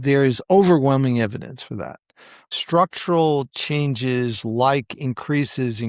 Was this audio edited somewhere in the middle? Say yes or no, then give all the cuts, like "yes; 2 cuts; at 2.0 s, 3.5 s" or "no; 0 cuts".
yes; 1 cut; at 2.3 s